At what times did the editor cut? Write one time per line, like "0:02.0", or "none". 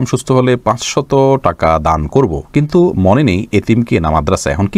none